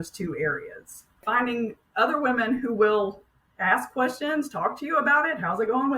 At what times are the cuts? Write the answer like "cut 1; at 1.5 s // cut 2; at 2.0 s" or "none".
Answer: cut 1; at 1.2 s